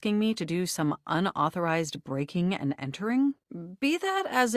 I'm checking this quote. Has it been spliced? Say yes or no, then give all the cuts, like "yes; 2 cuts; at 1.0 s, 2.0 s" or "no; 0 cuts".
no; 0 cuts